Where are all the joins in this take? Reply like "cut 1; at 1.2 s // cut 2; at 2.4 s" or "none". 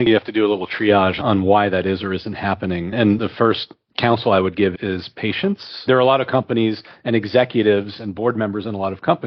cut 1; at 3.2 s // cut 2; at 5.9 s